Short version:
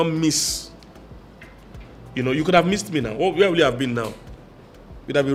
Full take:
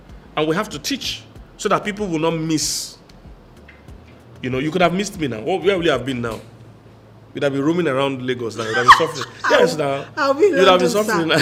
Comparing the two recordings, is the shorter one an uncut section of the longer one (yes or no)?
yes